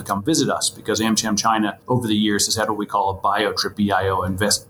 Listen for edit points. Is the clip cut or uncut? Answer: cut